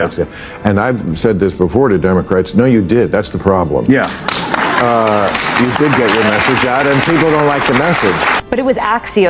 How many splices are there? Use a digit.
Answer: 1